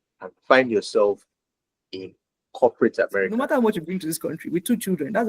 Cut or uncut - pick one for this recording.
cut